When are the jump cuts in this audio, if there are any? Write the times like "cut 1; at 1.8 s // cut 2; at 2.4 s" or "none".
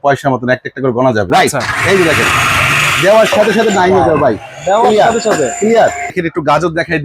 cut 1; at 1.3 s // cut 2; at 6.2 s

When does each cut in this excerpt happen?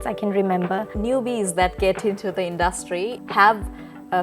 cut 1; at 0.9 s // cut 2; at 3.2 s

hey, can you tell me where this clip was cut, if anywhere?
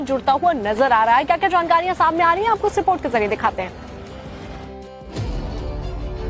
cut 1; at 5.0 s

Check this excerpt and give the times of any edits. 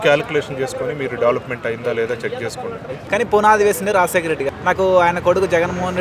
cut 1; at 3.0 s // cut 2; at 4.4 s

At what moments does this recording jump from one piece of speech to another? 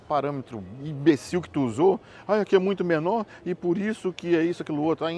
none

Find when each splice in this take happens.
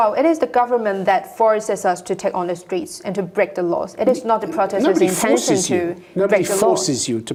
none

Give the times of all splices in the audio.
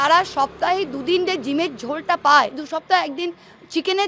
cut 1; at 2.6 s

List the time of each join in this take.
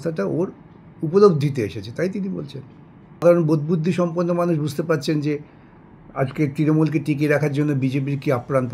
cut 1; at 3.2 s

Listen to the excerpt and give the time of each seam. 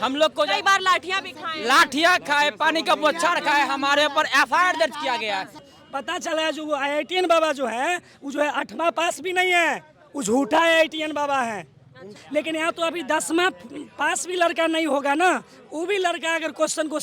cut 1; at 5.7 s // cut 2; at 12.2 s

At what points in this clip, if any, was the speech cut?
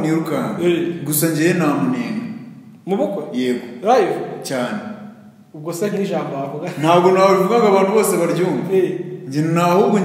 none

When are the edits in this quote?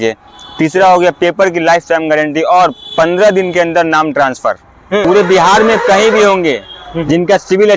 cut 1; at 5.0 s

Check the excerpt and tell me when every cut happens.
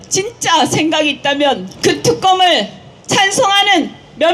cut 1; at 1.7 s

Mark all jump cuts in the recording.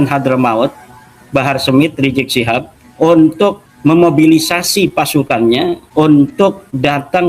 cut 1; at 2.8 s // cut 2; at 3.7 s // cut 3; at 5.8 s

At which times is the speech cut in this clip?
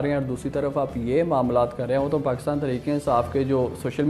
none

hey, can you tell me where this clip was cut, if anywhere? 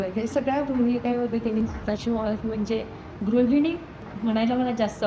cut 1; at 1.6 s // cut 2; at 4.1 s

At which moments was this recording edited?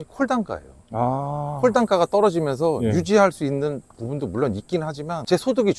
none

